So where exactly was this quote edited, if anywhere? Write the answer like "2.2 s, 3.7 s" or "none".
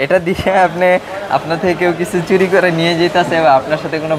none